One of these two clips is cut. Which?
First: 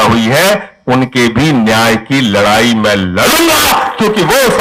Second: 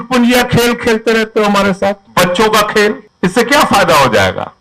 second; 2 cuts; at 2.0 s, 3.1 s

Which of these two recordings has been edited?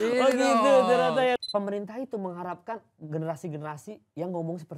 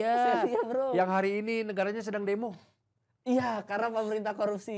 first; 1 cut; at 1.4 s

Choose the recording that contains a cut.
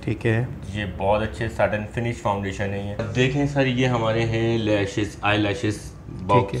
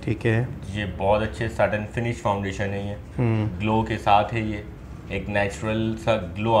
first; 1 cut; at 3.0 s

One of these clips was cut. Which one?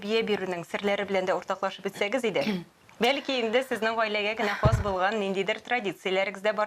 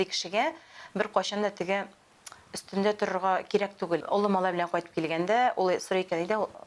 second; 1 cut; at 4.0 s

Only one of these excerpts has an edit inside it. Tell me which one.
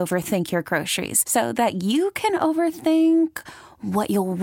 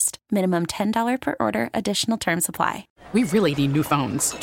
second; 1 cut; at 2.9 s

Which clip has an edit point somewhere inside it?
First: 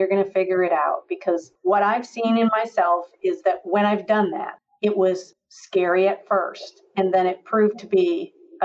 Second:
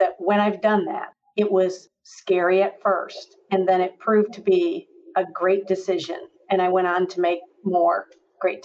first; 1 cut; at 1.5 s

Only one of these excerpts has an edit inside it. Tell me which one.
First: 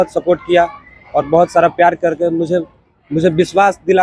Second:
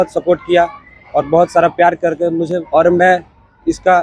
second; 1 cut; at 2.6 s

